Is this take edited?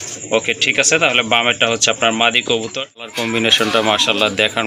yes; 1 cut; at 3.1 s

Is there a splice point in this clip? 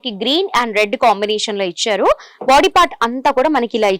no; 0 cuts

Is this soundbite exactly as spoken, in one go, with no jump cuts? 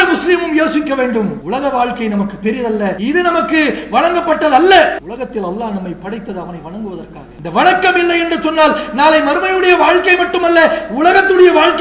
no; 4 cuts; at 1.4 s, 3.0 s, 5.0 s, 7.2 s

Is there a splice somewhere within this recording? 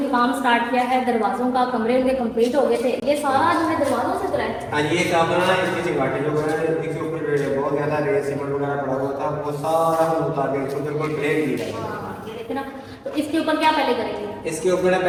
no; 0 cuts

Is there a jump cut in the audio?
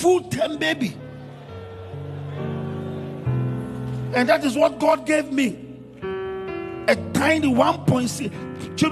no; 0 cuts

